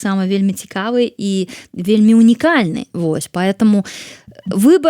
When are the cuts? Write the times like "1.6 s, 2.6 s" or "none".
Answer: none